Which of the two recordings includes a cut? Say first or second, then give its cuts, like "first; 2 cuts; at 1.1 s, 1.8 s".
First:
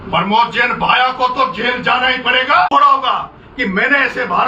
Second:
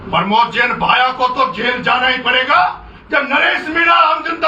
first; 1 cut; at 2.7 s